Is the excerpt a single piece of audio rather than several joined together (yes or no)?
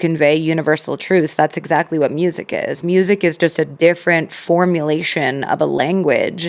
yes